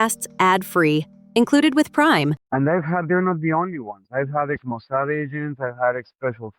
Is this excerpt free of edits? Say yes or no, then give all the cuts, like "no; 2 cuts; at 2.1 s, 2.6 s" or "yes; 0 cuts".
no; 1 cut; at 2.4 s